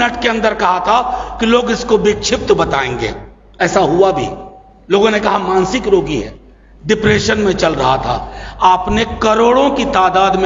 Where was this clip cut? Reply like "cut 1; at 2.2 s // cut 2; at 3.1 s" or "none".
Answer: none